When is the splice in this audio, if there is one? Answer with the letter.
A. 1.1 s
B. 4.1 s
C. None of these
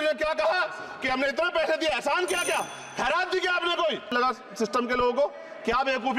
B